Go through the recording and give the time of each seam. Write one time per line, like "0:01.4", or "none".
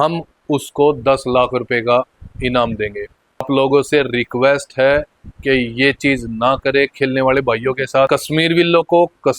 0:03.4
0:08.1